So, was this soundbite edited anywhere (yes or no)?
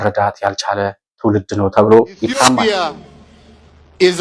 yes